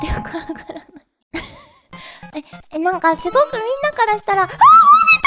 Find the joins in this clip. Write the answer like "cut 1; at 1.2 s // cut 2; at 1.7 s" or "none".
cut 1; at 1.2 s